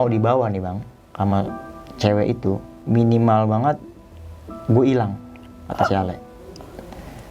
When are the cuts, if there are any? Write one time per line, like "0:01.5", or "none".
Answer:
0:02.7

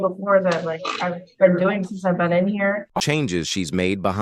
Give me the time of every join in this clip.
none

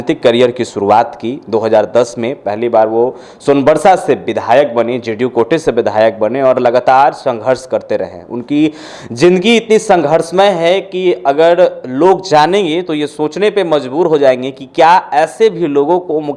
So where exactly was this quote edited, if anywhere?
none

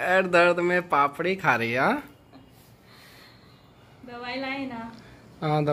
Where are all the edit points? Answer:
none

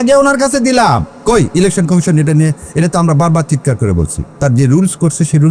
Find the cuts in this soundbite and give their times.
0:01.1
0:04.2

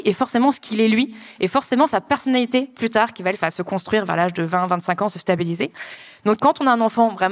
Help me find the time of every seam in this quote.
0:06.4

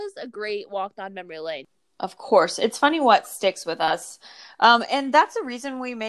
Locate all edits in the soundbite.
0:01.7

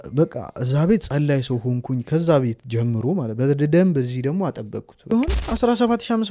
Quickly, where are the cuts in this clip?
0:05.1

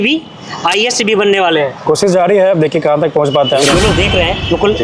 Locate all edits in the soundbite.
0:01.8
0:03.6

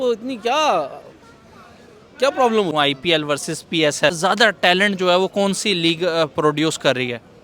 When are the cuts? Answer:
0:02.7
0:04.2

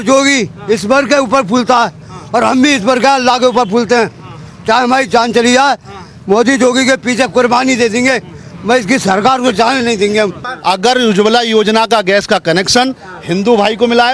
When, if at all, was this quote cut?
0:10.5

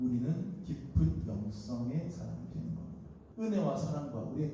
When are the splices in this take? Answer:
0:03.2

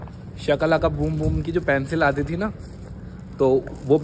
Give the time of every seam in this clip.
none

